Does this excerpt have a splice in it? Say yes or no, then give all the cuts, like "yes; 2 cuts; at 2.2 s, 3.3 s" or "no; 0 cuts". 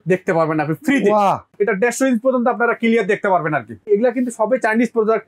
yes; 2 cuts; at 1.5 s, 3.8 s